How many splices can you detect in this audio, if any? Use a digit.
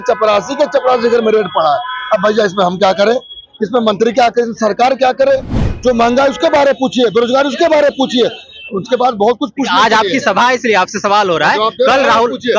1